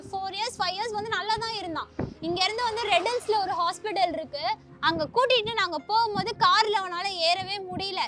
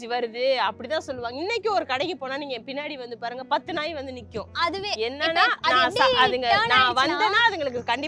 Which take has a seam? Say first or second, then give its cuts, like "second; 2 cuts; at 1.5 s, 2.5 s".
first; 1 cut; at 4.7 s